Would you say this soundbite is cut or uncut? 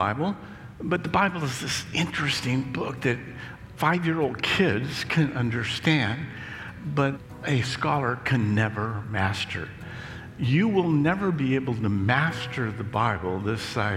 cut